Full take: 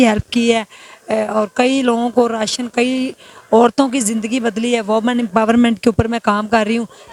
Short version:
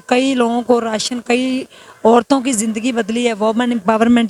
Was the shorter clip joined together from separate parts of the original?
no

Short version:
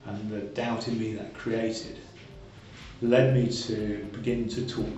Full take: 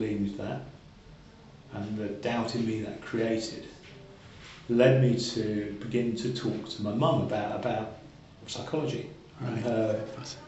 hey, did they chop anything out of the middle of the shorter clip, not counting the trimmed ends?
no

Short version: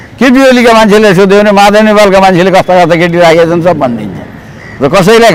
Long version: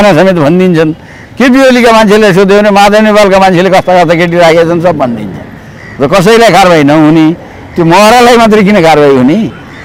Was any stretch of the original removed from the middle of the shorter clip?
no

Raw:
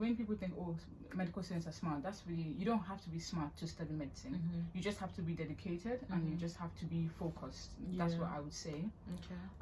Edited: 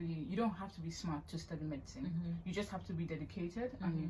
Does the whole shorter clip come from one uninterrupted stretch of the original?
yes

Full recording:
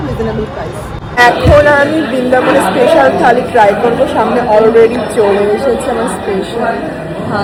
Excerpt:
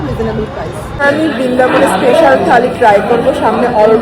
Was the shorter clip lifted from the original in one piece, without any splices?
no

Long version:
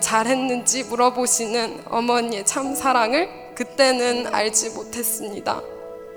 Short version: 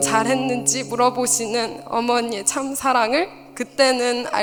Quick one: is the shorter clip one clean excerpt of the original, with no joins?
yes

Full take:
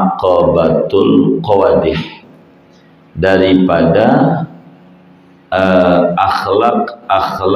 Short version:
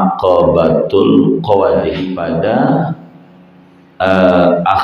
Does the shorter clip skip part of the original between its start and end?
yes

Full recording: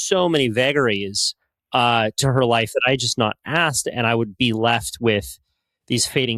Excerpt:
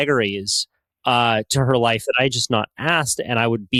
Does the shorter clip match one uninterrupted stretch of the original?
yes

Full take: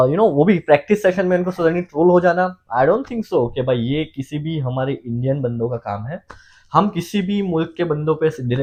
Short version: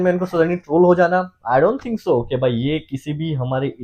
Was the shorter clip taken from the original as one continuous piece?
yes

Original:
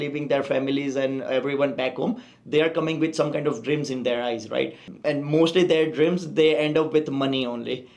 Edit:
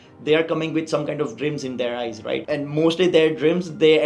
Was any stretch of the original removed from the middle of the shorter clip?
yes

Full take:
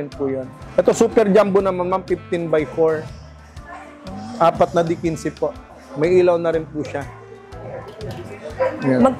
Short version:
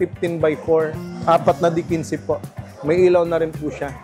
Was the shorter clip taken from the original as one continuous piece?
no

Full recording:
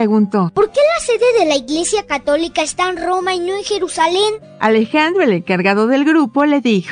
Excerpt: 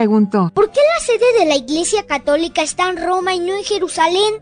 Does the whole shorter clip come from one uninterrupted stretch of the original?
yes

